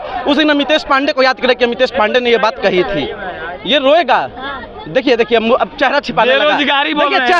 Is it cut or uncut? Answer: uncut